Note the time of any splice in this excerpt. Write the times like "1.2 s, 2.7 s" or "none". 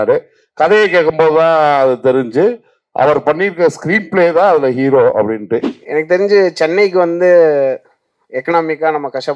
5.7 s